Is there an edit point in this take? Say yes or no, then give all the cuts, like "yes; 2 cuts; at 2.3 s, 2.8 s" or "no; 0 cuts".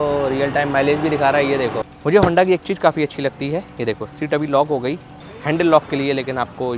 yes; 2 cuts; at 1.9 s, 5.2 s